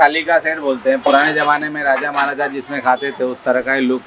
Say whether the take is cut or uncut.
uncut